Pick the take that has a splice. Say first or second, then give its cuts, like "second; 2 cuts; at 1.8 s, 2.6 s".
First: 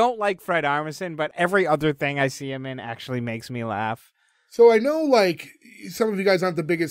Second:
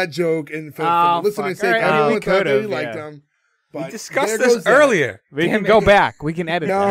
first; 1 cut; at 1.3 s